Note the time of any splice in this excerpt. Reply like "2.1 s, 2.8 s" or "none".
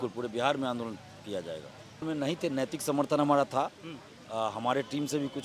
2.0 s